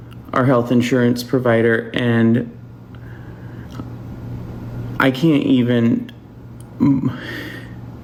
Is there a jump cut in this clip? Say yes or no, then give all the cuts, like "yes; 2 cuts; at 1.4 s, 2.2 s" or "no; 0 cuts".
no; 0 cuts